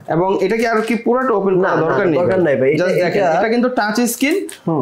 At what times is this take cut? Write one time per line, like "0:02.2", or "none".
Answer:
none

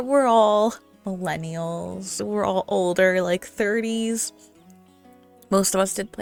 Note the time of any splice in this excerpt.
none

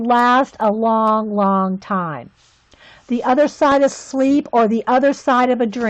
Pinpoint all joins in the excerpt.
0:02.3

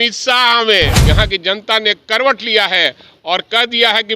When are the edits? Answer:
0:01.0

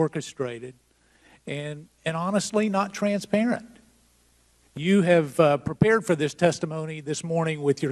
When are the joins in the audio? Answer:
0:03.5

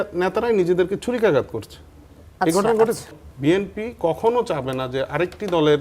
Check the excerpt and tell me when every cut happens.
0:03.2

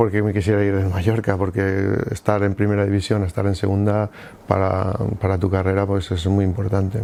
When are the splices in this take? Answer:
none

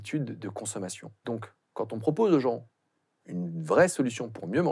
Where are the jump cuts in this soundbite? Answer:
0:01.1

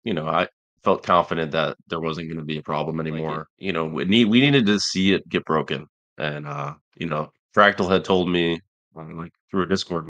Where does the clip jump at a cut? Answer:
0:03.5

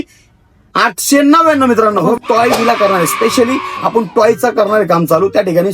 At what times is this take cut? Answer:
0:02.2

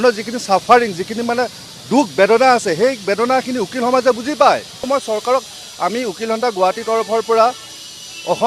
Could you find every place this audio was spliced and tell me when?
0:04.8

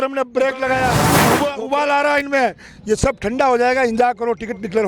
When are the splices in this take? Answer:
0:01.1

